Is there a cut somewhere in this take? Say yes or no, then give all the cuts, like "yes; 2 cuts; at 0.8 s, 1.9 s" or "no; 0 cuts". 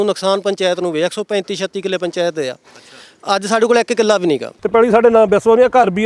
yes; 1 cut; at 4.5 s